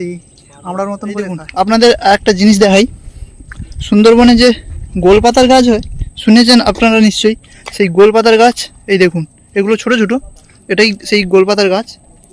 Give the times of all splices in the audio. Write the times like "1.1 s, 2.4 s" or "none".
1.5 s